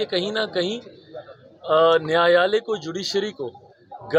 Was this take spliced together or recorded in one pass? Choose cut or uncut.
uncut